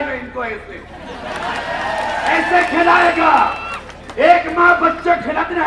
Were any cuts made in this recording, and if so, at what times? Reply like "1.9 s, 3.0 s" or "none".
none